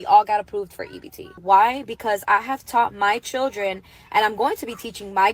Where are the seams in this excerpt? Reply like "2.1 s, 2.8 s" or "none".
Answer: 1.4 s

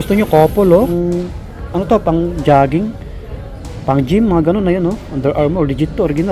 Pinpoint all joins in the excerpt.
0.9 s

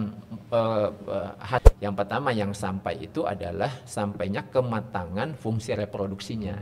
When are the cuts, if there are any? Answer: 1.6 s

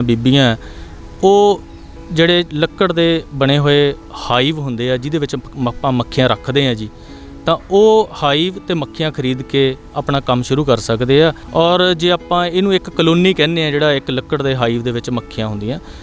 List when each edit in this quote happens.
11.4 s

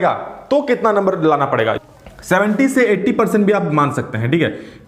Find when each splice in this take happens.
1.8 s

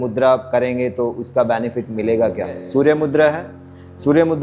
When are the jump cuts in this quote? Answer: 2.6 s

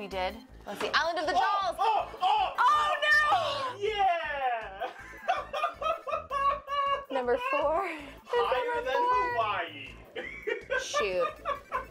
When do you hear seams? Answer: none

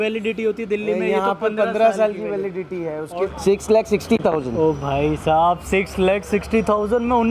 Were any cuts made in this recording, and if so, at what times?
3.3 s

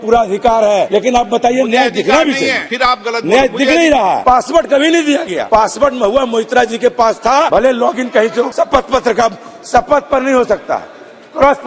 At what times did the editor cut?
0.9 s, 2.6 s, 4.2 s, 5.4 s, 7.5 s, 8.5 s

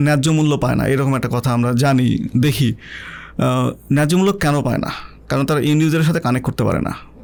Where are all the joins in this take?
none

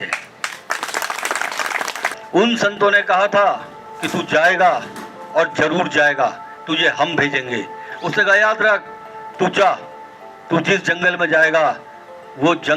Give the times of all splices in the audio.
2.1 s, 7.9 s

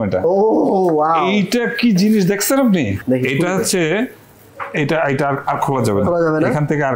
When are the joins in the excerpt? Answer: 2.9 s

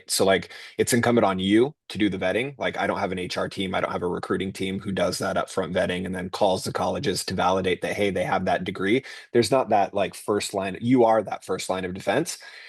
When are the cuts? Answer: none

